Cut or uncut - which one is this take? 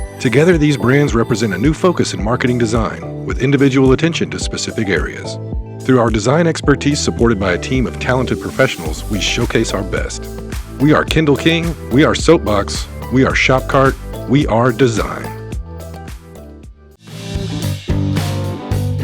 cut